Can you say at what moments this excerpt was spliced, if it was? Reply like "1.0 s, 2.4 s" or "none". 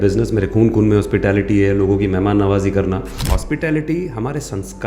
3.3 s

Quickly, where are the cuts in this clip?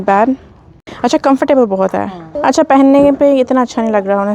0.9 s, 2.2 s

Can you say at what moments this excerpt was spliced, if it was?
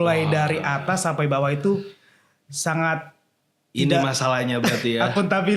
none

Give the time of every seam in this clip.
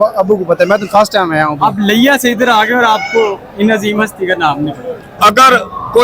5.1 s

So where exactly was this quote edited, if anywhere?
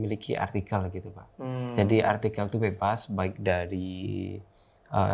none

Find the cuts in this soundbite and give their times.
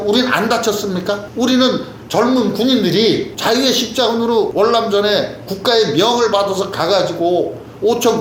1.3 s, 4.5 s

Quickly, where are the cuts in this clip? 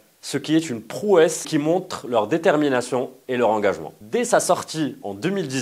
3.9 s

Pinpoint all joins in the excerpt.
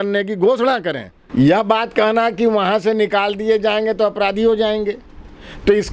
1.1 s

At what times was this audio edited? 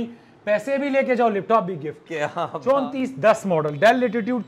2.5 s

